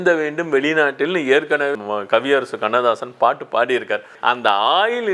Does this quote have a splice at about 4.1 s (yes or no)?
yes